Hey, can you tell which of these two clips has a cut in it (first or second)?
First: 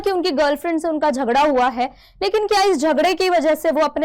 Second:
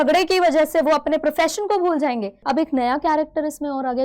second